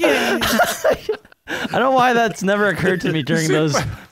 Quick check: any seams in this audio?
yes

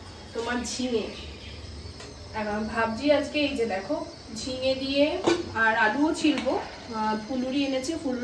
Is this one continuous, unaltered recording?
yes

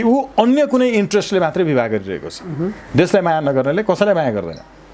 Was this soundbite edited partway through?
no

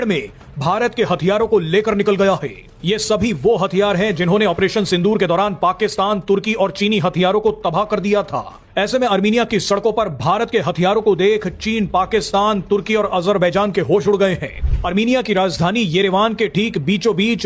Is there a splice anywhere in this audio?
no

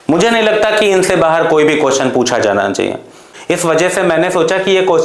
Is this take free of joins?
no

